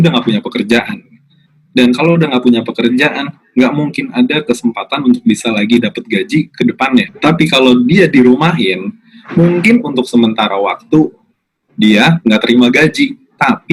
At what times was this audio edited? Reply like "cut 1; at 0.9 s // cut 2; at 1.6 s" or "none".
cut 1; at 7.1 s